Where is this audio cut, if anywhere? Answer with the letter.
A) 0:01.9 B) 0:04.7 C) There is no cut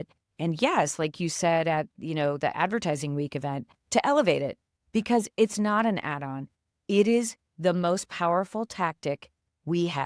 A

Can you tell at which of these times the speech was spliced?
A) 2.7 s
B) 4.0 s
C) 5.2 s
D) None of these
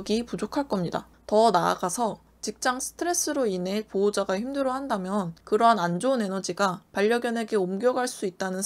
D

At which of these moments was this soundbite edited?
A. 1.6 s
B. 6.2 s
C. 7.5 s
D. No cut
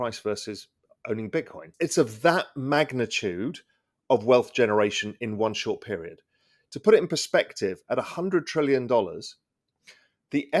A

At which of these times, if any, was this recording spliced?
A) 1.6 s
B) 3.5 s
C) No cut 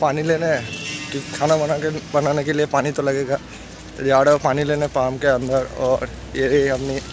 C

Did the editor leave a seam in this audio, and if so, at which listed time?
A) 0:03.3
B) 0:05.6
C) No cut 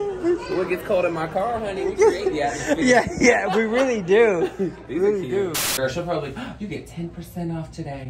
B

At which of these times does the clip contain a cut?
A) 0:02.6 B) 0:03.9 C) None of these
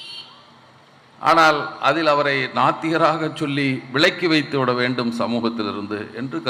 C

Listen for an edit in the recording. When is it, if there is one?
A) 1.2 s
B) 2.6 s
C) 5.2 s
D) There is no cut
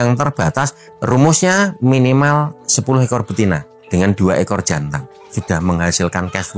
C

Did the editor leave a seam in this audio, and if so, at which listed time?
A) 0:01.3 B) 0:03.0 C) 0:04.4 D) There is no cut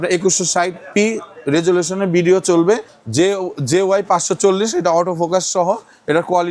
B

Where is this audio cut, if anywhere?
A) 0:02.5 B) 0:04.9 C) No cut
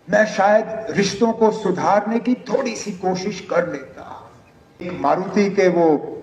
B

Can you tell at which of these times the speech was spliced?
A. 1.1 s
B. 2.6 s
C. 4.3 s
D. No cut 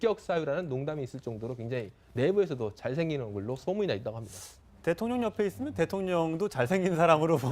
A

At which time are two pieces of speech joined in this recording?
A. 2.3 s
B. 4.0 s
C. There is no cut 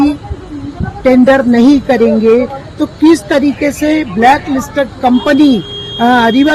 C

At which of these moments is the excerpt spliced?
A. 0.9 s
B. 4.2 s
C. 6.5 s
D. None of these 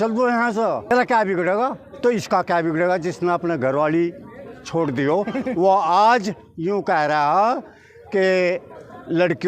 A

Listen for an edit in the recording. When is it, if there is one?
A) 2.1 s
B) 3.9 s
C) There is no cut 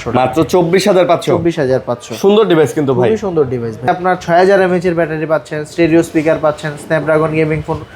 B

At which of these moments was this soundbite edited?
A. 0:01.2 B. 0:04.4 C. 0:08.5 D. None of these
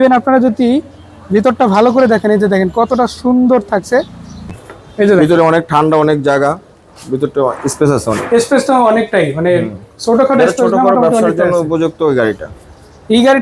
B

